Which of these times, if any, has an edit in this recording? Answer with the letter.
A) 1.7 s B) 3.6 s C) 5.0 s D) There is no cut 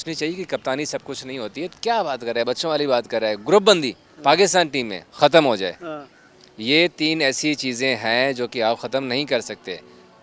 A